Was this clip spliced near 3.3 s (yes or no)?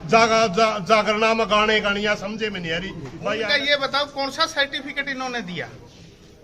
yes